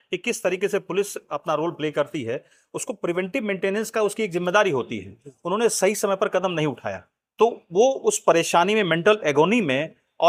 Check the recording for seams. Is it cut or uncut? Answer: uncut